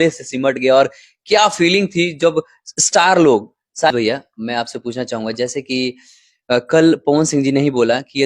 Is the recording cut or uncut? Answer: cut